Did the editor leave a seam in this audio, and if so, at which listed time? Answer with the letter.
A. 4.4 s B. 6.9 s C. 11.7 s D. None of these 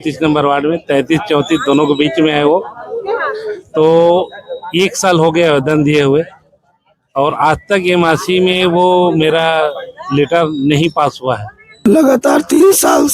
C